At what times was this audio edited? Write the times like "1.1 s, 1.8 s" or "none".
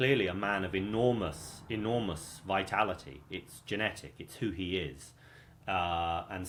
none